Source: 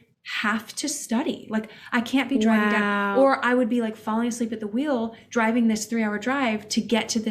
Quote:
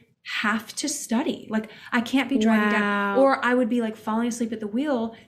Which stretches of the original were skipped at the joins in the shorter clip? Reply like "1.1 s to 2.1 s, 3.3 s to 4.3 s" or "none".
none